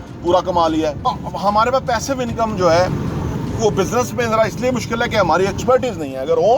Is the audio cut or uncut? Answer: cut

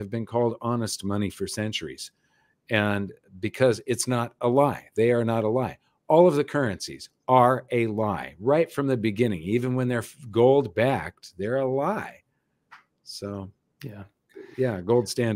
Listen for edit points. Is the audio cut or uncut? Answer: uncut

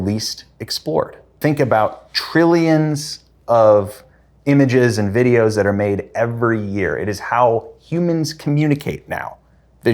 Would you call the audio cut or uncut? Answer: cut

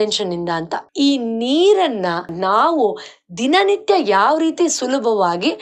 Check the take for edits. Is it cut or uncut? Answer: cut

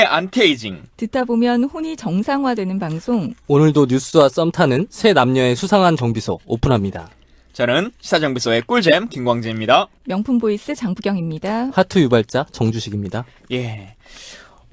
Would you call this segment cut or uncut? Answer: uncut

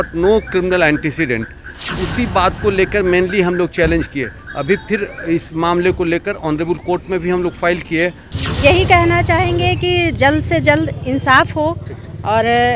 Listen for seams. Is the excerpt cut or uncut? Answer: cut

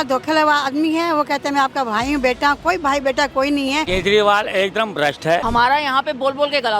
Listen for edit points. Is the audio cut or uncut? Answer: cut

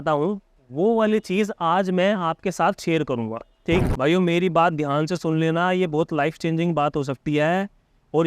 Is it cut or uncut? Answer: cut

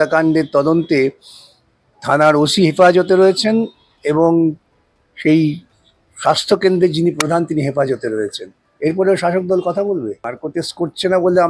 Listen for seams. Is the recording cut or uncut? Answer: cut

